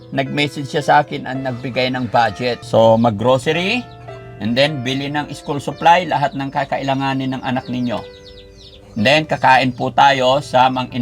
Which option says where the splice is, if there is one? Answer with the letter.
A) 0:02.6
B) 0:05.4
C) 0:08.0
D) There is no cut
A